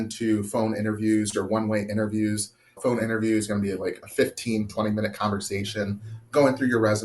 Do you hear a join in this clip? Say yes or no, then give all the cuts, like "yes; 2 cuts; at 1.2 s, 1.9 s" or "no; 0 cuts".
yes; 1 cut; at 2.8 s